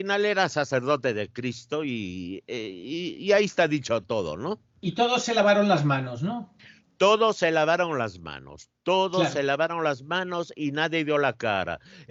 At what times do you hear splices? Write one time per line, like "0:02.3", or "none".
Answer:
none